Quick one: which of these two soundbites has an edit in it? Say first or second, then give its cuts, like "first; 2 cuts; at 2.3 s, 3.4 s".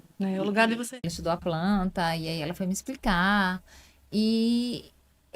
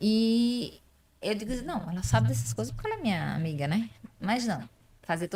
first; 1 cut; at 1.1 s